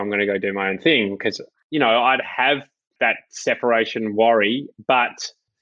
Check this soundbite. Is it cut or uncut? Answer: cut